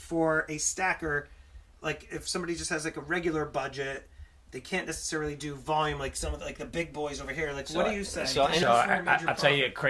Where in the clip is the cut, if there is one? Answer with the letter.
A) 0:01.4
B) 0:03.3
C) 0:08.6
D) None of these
C